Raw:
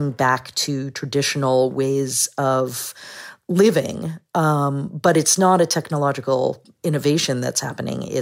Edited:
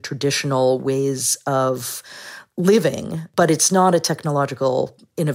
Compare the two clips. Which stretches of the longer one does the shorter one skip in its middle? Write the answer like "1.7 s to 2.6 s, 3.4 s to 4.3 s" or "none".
4.1 s to 4.9 s